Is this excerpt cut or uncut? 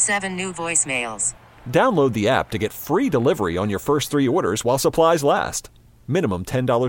uncut